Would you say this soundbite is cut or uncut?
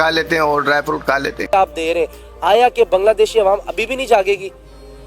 cut